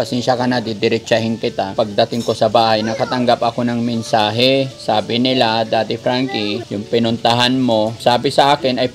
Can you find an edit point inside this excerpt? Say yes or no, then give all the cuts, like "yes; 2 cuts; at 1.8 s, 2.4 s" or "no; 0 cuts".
yes; 4 cuts; at 1.7 s, 4.8 s, 6.6 s, 8.0 s